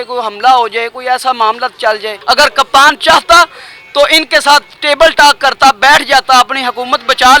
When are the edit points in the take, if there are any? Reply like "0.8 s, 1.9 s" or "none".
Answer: 2.1 s